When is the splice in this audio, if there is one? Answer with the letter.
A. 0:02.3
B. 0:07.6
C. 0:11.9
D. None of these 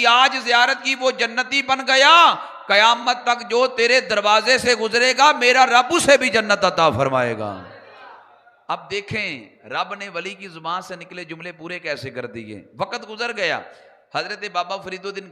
D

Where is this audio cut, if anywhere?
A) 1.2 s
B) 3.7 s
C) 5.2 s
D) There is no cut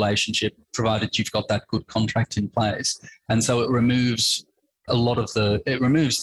D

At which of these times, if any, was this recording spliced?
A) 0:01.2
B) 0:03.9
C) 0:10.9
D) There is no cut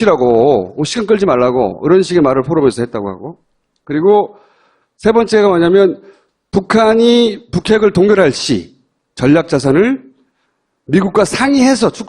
A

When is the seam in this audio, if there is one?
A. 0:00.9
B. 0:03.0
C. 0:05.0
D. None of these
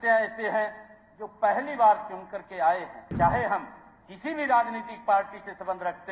B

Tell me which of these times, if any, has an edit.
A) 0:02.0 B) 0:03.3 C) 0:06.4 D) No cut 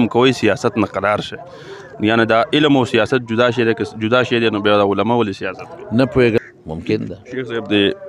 C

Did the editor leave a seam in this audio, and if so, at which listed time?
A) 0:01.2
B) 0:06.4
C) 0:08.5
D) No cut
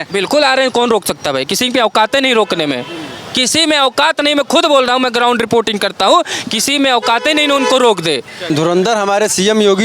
C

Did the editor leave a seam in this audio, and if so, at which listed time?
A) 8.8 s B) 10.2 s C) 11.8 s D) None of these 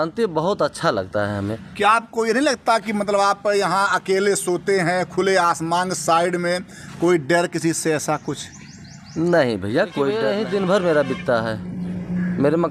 B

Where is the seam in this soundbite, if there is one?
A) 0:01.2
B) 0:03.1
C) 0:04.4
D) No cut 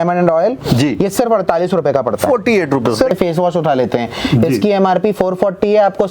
B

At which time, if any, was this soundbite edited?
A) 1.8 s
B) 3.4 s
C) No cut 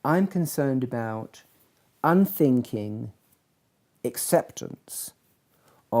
C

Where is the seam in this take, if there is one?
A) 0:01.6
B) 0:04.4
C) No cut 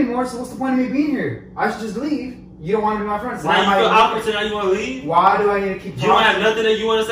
C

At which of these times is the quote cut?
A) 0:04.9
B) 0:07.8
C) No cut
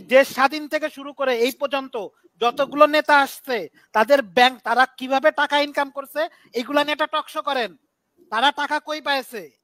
C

